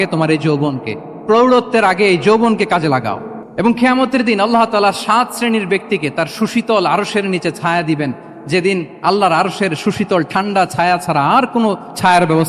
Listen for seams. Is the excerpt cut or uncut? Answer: uncut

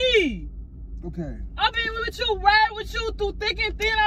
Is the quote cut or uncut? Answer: uncut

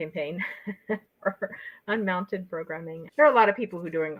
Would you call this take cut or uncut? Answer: uncut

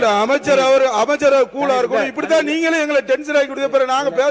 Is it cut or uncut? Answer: uncut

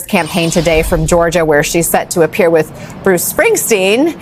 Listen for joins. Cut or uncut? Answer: uncut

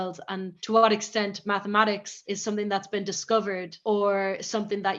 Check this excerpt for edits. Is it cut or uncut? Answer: cut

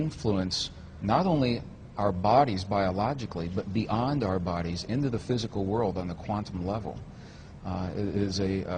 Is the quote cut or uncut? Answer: uncut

